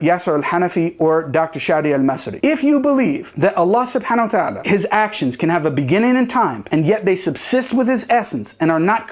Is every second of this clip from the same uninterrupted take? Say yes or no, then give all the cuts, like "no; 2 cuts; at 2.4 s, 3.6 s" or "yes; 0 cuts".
yes; 0 cuts